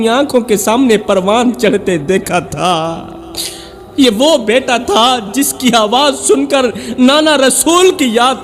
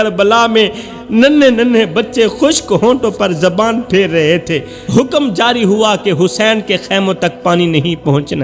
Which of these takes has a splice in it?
second; 1 cut; at 4.7 s

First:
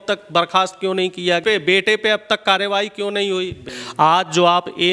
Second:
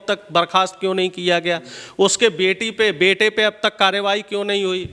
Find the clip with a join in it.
first; 2 cuts; at 1.4 s, 3.7 s

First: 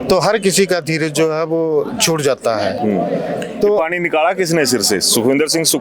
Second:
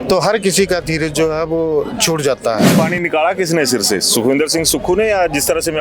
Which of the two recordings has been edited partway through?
second; 1 cut; at 2.8 s

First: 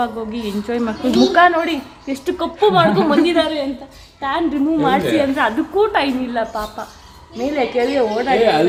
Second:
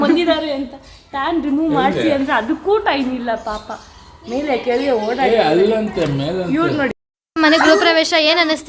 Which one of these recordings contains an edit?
second; 1 cut; at 7.0 s

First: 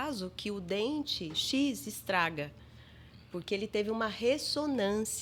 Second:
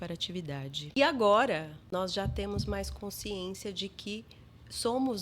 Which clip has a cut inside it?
second; 2 cuts; at 0.8 s, 1.8 s

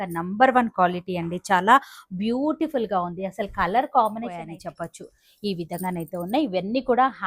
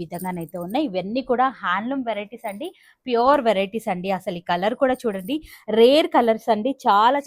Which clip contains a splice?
first; 1 cut; at 4.5 s

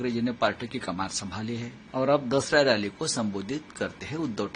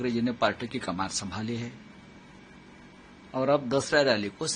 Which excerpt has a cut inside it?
first; 1 cut; at 1.8 s

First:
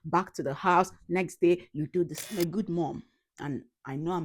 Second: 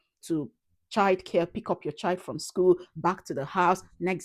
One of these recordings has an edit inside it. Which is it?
first; 1 cut; at 2.3 s

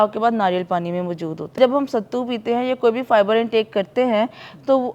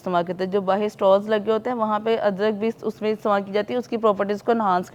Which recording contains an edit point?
first; 1 cut; at 1.5 s

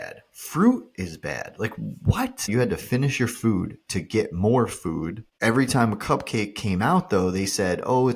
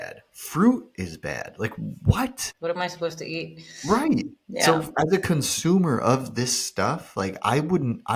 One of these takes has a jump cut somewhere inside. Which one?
first; 2 cuts; at 2.5 s, 5.3 s

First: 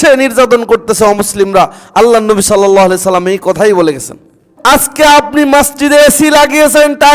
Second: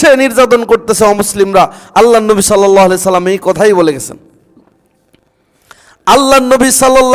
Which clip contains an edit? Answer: first; 1 cut; at 4.4 s

